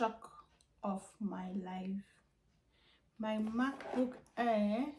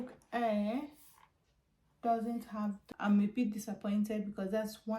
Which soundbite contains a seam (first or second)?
second